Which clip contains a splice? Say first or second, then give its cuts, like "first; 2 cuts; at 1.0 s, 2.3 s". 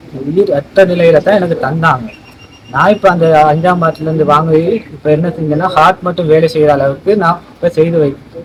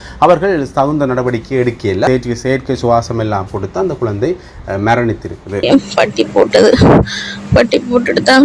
second; 2 cuts; at 2.1 s, 5.6 s